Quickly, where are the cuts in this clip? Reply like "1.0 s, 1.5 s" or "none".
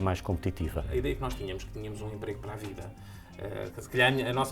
0.9 s